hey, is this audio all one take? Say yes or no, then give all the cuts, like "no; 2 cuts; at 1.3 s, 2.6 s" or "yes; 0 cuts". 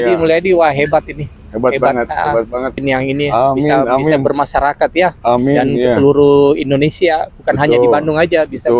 no; 1 cut; at 2.8 s